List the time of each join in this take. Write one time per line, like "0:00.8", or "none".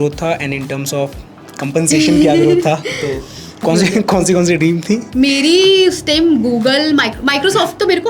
0:03.6